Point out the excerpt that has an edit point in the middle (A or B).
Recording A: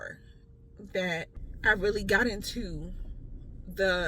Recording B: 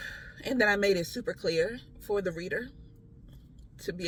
A